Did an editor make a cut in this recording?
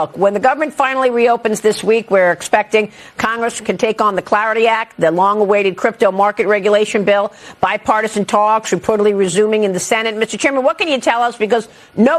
no; 0 cuts

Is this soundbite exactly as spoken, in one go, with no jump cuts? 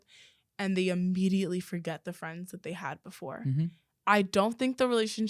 yes; 0 cuts

